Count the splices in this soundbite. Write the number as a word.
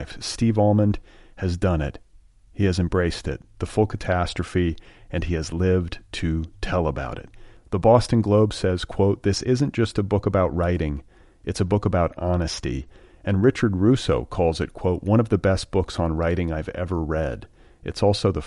zero